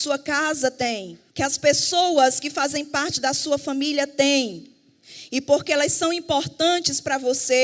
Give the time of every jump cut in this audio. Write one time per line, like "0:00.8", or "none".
0:01.2